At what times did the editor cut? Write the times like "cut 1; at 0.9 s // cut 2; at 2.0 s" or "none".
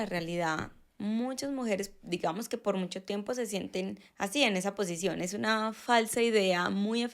none